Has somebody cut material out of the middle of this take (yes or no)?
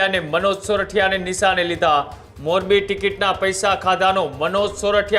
no